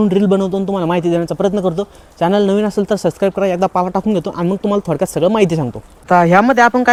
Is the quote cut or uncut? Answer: uncut